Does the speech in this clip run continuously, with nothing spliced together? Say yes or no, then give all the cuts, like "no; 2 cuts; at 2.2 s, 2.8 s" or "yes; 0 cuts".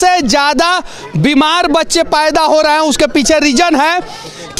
yes; 0 cuts